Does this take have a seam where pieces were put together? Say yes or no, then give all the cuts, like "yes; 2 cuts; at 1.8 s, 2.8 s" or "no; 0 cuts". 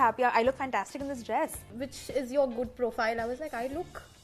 yes; 1 cut; at 1.7 s